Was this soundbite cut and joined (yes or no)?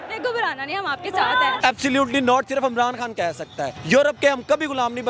yes